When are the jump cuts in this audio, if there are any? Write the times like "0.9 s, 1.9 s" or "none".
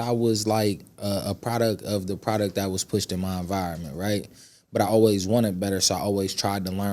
none